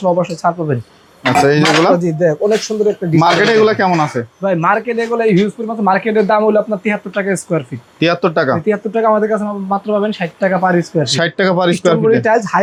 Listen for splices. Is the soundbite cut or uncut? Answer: uncut